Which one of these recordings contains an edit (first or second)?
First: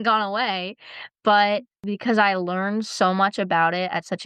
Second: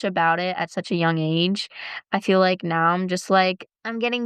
first